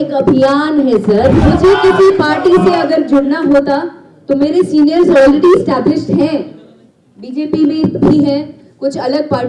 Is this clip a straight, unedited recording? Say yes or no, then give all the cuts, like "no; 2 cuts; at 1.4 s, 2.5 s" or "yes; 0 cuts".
no; 1 cut; at 1.4 s